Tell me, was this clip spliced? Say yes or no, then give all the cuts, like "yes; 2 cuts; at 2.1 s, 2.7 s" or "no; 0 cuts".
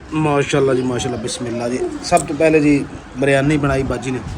no; 0 cuts